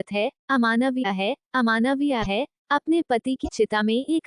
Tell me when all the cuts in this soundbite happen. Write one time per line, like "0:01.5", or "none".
0:02.3